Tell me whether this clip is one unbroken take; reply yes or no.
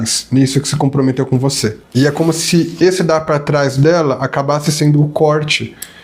no